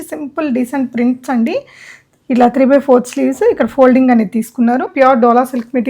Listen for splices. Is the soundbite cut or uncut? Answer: cut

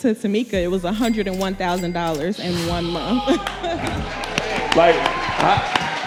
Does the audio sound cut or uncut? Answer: uncut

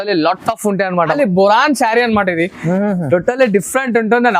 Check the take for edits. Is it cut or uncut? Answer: cut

